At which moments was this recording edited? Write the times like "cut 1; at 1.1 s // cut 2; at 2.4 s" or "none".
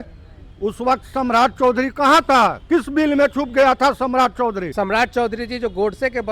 cut 1; at 4.6 s